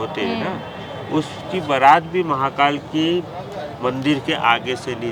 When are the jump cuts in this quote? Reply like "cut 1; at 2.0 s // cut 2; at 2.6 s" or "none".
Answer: none